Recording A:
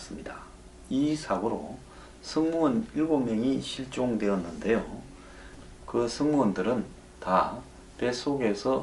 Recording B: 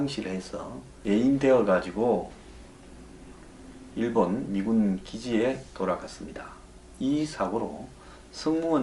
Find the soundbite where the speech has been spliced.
A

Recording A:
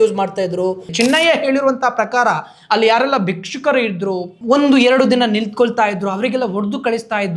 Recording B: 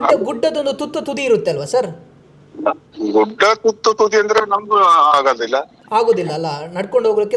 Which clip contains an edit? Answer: A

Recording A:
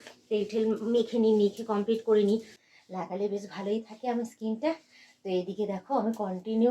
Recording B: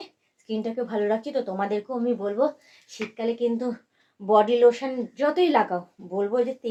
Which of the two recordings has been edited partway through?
A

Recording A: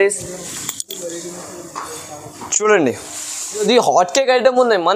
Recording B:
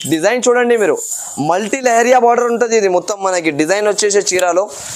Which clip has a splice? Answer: A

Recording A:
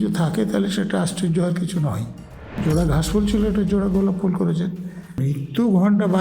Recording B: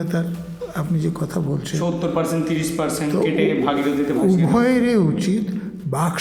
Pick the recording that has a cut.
A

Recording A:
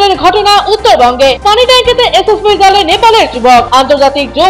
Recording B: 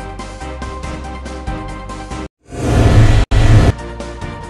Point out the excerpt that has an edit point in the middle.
B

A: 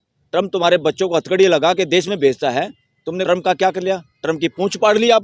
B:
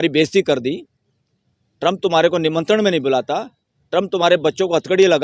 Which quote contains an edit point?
A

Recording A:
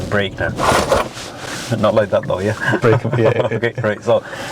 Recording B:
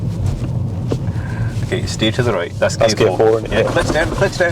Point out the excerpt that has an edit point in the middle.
A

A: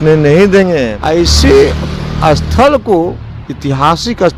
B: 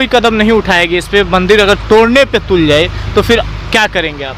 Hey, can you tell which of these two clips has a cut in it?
A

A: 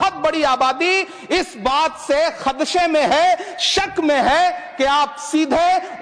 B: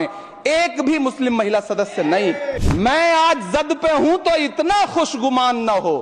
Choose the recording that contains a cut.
B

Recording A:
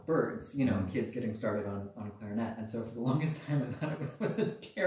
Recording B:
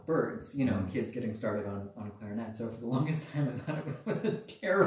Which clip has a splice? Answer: B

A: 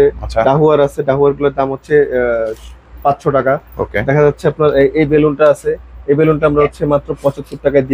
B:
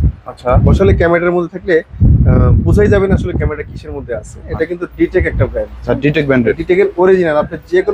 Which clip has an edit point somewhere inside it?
B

